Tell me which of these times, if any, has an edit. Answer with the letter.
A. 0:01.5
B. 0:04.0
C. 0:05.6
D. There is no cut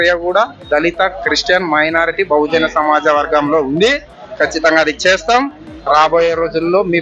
D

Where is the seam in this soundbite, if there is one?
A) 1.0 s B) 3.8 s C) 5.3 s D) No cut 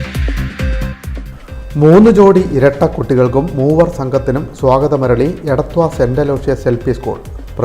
A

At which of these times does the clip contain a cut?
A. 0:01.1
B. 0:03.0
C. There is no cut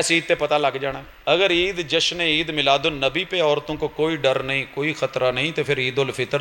A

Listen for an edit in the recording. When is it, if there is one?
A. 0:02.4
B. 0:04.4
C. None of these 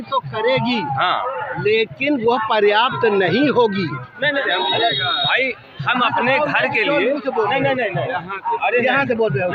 B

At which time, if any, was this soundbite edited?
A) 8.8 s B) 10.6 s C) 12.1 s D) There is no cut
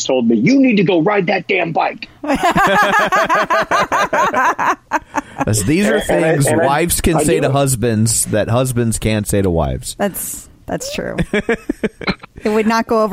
C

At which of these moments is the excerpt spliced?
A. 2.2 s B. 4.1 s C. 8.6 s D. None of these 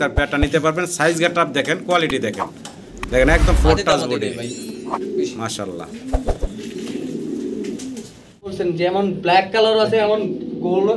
C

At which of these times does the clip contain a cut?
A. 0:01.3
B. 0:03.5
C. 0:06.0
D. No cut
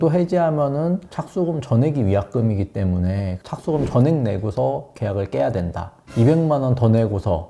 D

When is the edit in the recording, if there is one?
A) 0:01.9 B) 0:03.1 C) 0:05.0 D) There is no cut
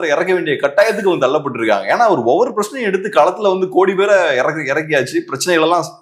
D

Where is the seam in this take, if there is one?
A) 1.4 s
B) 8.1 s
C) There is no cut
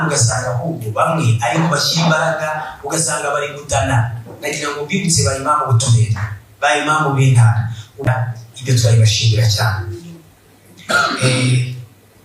B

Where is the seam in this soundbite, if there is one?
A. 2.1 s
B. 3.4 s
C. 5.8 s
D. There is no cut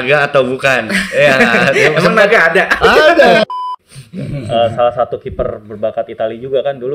B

